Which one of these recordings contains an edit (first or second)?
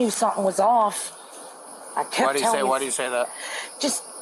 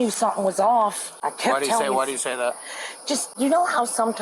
second